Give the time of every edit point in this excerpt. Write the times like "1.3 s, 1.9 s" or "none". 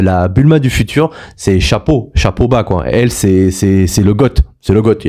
none